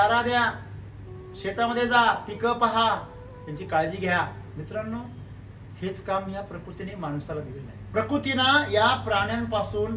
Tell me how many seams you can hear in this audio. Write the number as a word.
two